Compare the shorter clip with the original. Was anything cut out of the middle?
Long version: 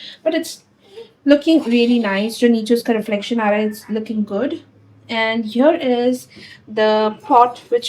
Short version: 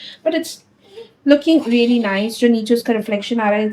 no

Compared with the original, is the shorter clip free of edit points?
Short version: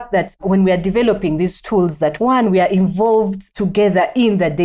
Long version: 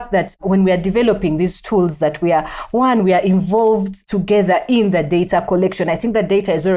no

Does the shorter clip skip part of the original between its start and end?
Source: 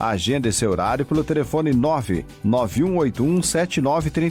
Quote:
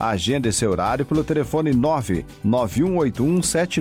no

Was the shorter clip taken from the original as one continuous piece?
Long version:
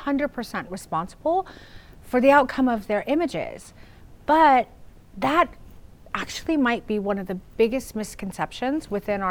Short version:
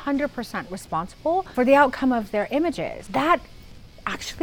no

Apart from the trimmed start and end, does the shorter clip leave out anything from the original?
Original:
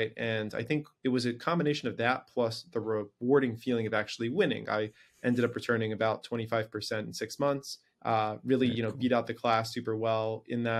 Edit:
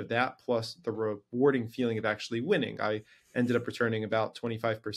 no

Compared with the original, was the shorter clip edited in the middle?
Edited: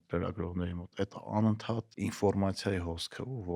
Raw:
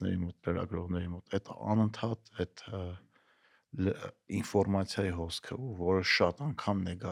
yes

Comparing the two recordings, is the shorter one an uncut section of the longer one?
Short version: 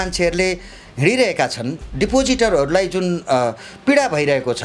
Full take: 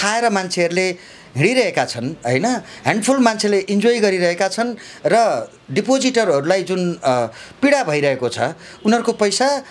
no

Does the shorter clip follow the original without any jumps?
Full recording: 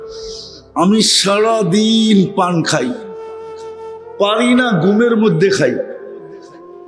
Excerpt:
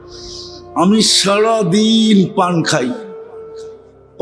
yes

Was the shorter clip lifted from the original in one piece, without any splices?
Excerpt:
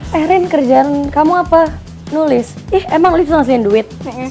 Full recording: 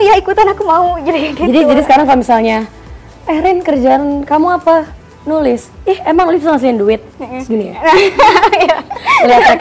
yes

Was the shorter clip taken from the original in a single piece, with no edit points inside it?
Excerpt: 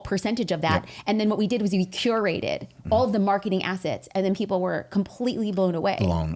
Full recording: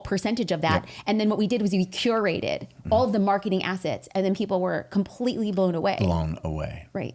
yes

